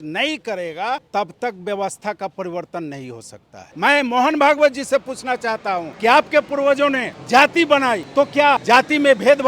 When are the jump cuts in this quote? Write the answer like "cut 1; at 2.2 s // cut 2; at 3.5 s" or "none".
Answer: cut 1; at 1.0 s // cut 2; at 3.7 s // cut 3; at 5.9 s // cut 4; at 7.1 s // cut 5; at 8.4 s